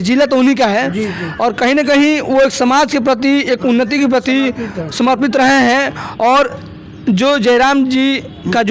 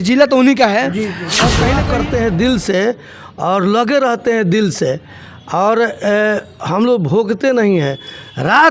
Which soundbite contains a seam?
second; 1 cut; at 1.7 s

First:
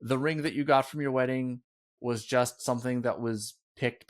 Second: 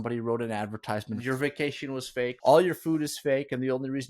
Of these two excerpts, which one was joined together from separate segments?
second; 2 cuts; at 1.2 s, 2.4 s

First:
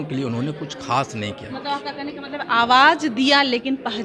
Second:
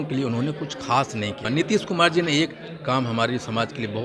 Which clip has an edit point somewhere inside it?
second; 1 cut; at 1.4 s

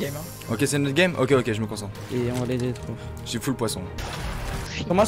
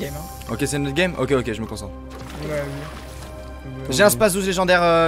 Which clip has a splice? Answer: second; 1 cut; at 1.9 s

